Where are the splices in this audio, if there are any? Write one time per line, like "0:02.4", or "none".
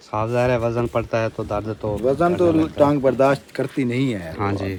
none